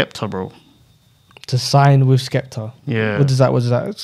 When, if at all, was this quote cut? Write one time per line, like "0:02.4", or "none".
none